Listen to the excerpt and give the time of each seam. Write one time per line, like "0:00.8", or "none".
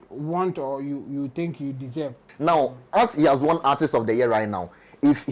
0:02.3